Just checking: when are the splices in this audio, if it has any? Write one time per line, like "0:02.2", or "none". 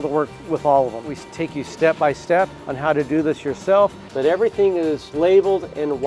0:01.1
0:02.6
0:04.1
0:05.1